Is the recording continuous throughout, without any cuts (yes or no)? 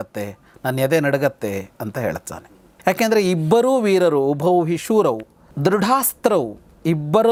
yes